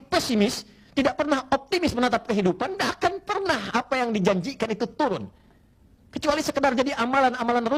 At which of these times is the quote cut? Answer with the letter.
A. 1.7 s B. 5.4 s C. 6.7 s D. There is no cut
D